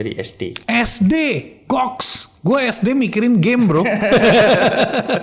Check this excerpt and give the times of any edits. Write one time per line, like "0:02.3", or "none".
none